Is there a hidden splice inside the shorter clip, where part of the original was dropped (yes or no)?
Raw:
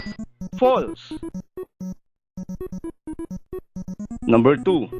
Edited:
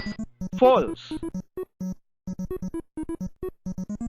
yes